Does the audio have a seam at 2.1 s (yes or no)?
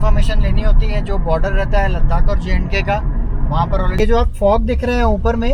no